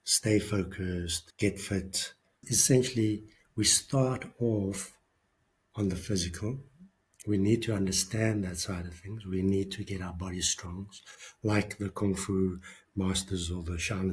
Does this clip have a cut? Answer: yes; 2 cuts; at 1.2 s, 2.5 s

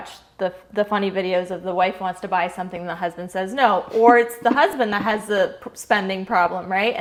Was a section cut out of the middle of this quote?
no; 0 cuts

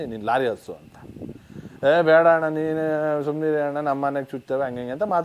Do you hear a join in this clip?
no; 0 cuts

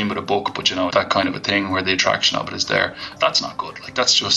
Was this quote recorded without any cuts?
no; 2 cuts; at 0.9 s, 3.1 s

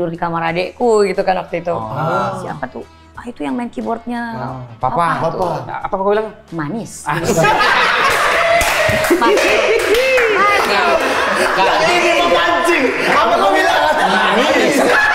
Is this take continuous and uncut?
yes; 0 cuts

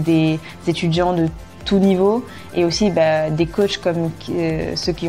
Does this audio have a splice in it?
no; 0 cuts

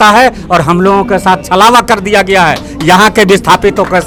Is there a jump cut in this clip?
no; 0 cuts

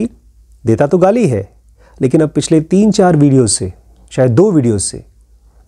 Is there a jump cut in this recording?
no; 0 cuts

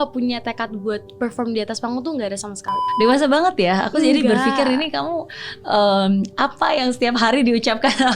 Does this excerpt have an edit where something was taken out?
yes; 1 cut; at 2.7 s

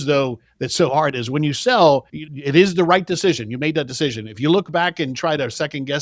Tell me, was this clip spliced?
no; 0 cuts

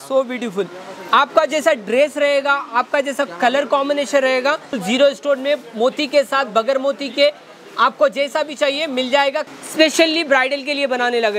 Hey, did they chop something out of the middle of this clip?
yes; 2 cuts; at 4.7 s, 9.5 s

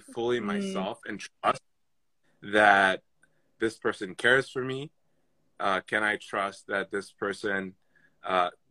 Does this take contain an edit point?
no; 0 cuts

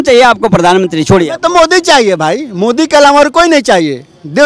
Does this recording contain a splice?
no; 0 cuts

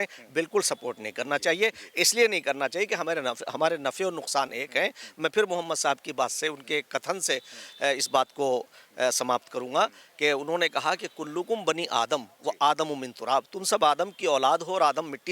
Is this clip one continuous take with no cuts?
yes; 0 cuts

